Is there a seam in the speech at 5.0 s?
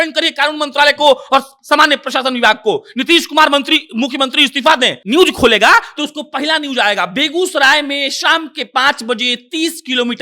yes; 1 cut; at 5.0 s

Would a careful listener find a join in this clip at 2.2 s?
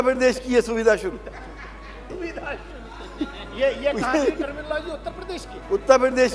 yes; 1 cut; at 2.2 s

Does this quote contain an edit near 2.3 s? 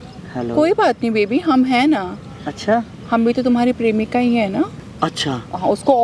no; 1 cut; at 4.8 s

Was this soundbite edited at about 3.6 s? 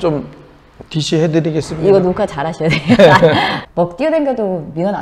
yes; 1 cut; at 3.6 s

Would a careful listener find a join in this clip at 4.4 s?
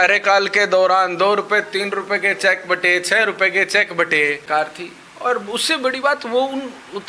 yes; 1 cut; at 4.4 s

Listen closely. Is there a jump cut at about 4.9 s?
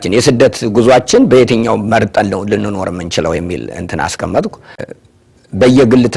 yes; 1 cut; at 4.9 s

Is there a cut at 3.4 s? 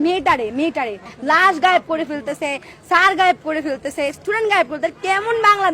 no; 1 cut; at 1.1 s

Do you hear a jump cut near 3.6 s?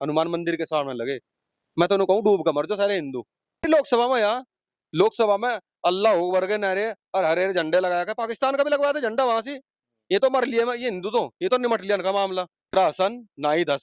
yes; 2 cuts; at 3.6 s, 12.7 s

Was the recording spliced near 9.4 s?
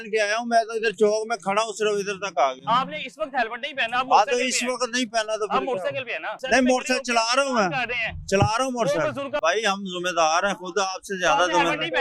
yes; 2 cuts; at 6.4 s, 9.4 s

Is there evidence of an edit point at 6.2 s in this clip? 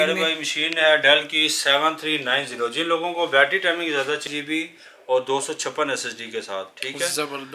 no; 1 cut; at 4.3 s

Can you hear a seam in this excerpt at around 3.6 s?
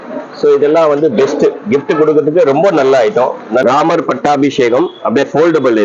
yes; 1 cut; at 3.6 s

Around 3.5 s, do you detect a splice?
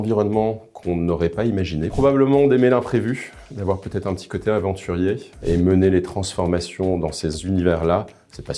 no; 2 cuts; at 1.9 s, 5.3 s

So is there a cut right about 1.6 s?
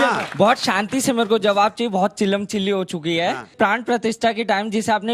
no; 1 cut; at 3.5 s

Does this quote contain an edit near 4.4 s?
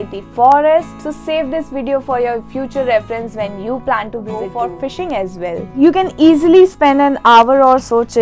yes; 1 cut; at 4.4 s

